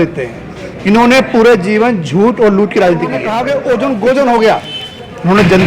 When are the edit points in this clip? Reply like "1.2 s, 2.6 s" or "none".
3.3 s

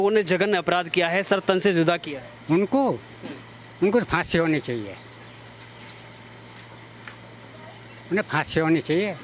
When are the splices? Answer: none

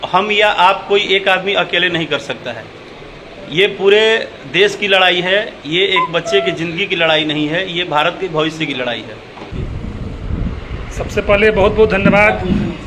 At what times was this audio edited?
9.6 s

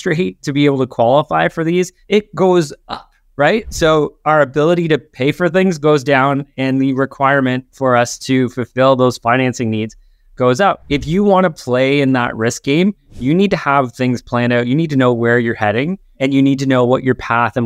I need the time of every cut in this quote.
2.0 s, 10.8 s, 16.0 s

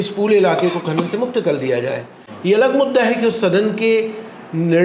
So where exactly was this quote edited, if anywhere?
none

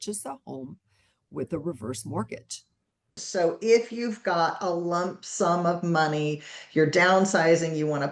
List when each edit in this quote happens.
3.2 s

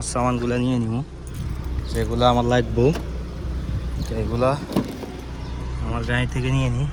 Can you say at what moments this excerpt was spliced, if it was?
none

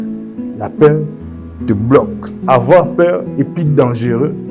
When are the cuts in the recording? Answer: 2.2 s

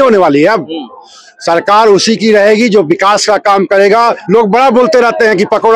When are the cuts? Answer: 4.2 s

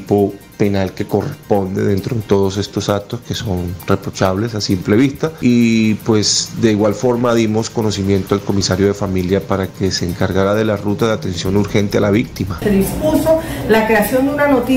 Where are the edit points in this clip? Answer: 5.3 s, 12.6 s

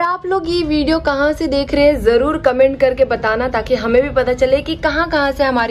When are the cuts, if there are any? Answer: none

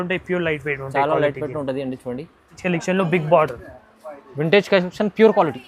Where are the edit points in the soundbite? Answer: 2.6 s

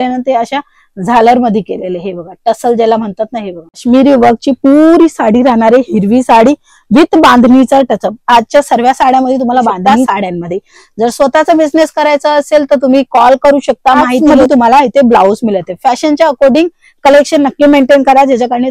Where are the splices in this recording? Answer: 3.8 s, 9.9 s, 14.2 s

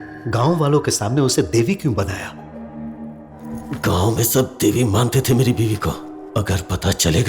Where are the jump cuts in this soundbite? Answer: 3.4 s

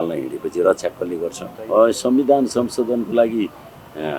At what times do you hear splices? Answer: 1.5 s

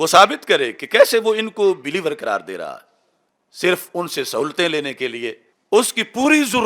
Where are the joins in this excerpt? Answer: 5.5 s

